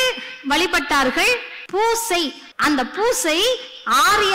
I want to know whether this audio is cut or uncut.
cut